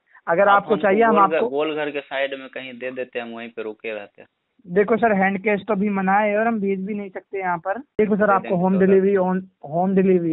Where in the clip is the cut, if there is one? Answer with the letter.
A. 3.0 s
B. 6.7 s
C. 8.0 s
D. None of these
C